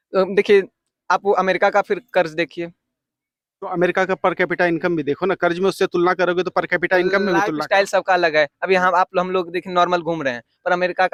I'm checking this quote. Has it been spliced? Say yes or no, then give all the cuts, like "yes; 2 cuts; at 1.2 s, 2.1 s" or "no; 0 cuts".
no; 0 cuts